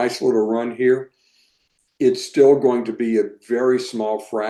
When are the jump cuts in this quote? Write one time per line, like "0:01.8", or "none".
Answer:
none